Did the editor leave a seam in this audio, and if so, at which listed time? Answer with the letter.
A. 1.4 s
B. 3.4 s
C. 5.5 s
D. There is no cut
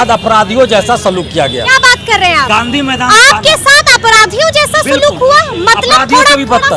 D